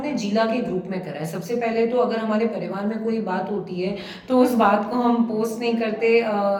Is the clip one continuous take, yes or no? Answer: yes